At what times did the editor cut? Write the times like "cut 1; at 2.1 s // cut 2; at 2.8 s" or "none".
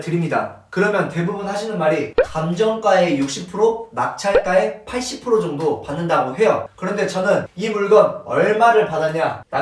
none